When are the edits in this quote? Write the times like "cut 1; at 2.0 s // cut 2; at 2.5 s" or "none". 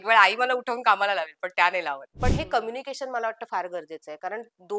cut 1; at 2.1 s